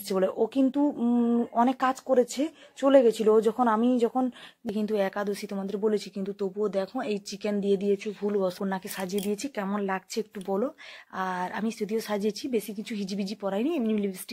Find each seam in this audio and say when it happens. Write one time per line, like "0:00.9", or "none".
0:04.5
0:08.6